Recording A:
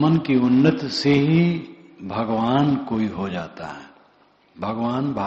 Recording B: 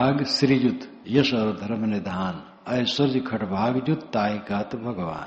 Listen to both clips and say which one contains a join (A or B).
B